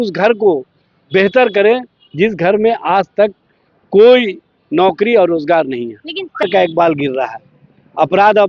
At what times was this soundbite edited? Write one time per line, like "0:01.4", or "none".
0:06.4